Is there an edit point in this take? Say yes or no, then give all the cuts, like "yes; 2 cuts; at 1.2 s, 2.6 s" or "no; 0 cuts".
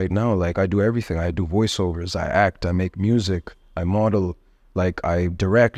no; 0 cuts